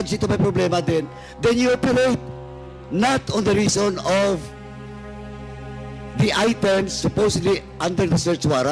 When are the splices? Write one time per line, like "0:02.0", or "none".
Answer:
none